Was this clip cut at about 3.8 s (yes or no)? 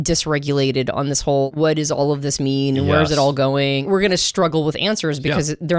yes